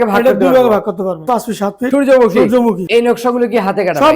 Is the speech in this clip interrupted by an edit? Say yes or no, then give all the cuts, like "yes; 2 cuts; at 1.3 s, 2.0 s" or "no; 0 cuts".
yes; 2 cuts; at 1.6 s, 2.8 s